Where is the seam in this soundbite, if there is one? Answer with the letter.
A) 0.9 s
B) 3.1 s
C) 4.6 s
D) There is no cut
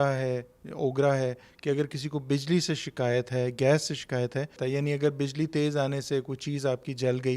C